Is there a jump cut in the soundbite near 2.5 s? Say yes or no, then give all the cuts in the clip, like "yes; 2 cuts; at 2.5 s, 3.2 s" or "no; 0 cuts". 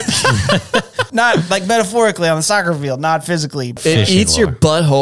no; 2 cuts; at 1.0 s, 3.7 s